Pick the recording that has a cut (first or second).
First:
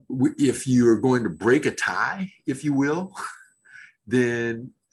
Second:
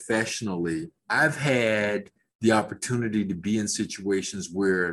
second